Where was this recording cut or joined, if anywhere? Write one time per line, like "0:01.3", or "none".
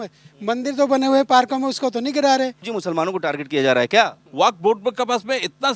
0:02.7
0:04.2